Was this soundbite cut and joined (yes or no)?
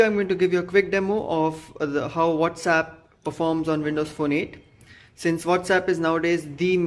yes